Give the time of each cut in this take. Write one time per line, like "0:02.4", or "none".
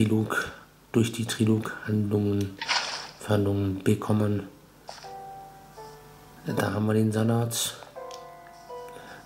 none